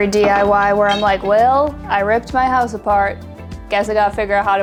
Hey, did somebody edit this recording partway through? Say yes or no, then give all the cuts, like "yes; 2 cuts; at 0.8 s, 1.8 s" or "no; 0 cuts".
no; 0 cuts